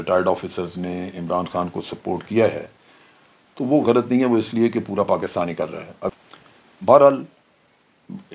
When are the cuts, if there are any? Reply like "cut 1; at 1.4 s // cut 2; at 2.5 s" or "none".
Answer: none